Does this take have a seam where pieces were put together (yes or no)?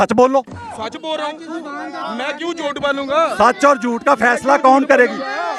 no